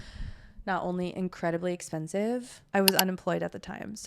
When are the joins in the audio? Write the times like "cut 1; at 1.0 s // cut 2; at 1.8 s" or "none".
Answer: cut 1; at 2.6 s

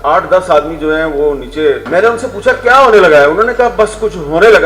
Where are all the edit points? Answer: cut 1; at 1.8 s

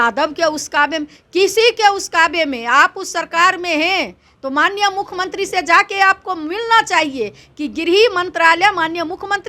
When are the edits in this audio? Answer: none

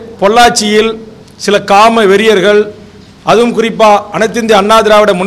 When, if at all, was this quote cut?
none

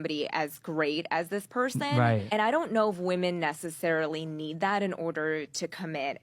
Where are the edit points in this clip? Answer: cut 1; at 4.8 s

